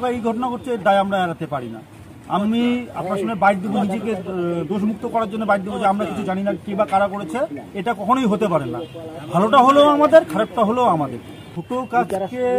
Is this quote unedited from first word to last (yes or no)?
no